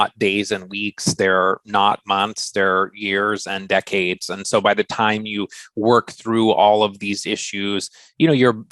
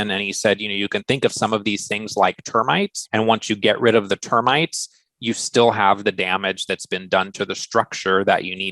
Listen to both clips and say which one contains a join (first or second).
second